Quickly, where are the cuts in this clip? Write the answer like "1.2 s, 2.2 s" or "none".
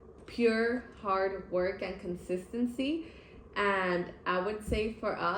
none